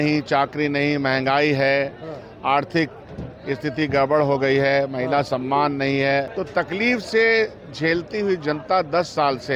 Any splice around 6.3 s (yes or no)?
yes